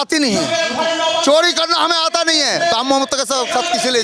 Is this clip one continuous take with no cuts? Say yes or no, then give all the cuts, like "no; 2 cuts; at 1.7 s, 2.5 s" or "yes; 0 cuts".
yes; 0 cuts